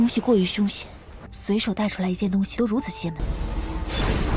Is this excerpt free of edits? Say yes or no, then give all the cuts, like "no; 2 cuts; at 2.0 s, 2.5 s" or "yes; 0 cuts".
yes; 0 cuts